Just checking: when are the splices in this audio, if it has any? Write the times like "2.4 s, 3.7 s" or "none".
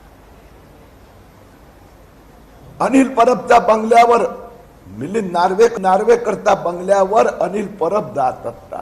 5.7 s